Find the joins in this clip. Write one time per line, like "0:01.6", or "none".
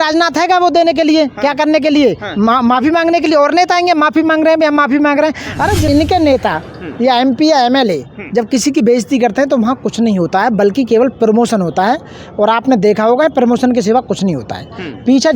0:05.9